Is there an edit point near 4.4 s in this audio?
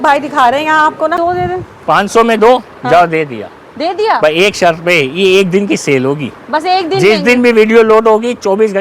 no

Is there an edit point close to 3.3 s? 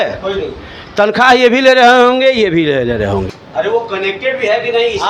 yes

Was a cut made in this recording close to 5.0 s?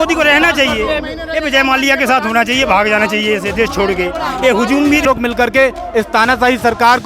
yes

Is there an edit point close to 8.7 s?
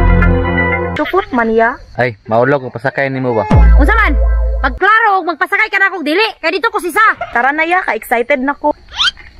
yes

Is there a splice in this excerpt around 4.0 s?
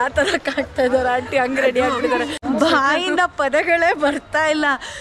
no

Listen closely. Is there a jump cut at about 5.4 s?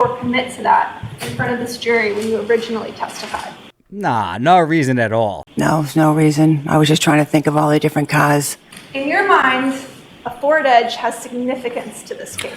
yes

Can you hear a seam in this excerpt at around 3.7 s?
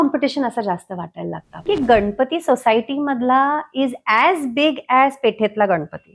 no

